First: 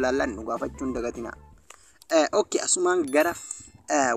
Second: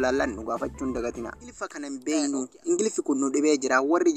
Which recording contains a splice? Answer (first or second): second